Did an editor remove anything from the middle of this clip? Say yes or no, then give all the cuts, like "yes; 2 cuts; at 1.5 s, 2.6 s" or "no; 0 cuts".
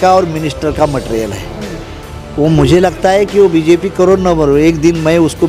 no; 0 cuts